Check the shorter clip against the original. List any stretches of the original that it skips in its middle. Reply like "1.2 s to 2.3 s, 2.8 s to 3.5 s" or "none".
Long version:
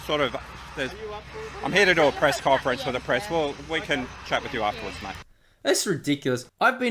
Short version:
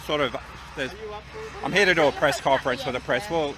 none